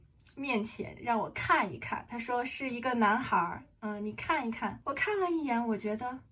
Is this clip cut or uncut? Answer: cut